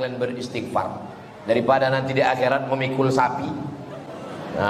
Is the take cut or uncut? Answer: uncut